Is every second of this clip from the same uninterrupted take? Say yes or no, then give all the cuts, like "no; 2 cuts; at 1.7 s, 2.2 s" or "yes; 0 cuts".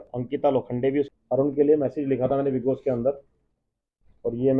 no; 1 cut; at 1.1 s